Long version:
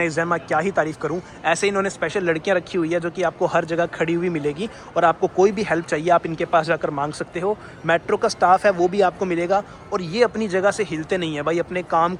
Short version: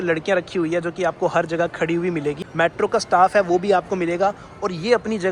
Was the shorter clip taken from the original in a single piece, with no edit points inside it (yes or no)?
no